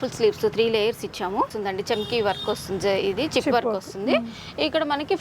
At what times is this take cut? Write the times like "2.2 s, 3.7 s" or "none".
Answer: 1.5 s